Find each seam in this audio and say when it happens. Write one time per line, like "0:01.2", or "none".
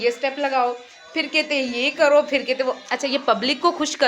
none